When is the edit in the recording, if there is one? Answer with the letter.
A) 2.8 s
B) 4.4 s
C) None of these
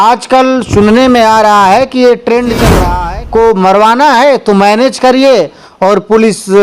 A